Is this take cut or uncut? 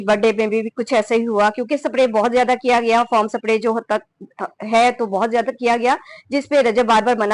uncut